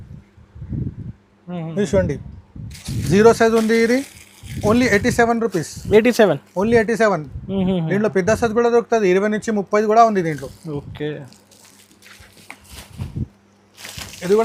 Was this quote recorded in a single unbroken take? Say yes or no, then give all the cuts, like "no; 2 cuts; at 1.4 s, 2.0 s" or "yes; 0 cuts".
yes; 0 cuts